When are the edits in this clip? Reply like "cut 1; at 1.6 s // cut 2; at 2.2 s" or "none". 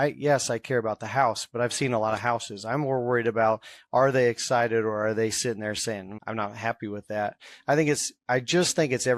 cut 1; at 6.1 s